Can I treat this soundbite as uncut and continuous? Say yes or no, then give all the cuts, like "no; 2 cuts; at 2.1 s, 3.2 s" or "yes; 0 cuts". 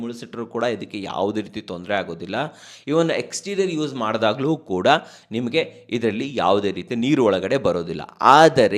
yes; 0 cuts